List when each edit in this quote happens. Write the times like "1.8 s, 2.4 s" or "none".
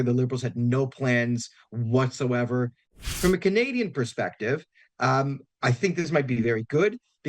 3.0 s